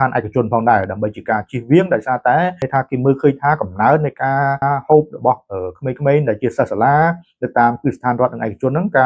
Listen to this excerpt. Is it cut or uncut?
cut